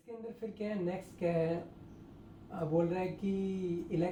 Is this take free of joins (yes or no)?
yes